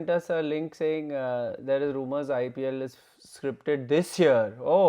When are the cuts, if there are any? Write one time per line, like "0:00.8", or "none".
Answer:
none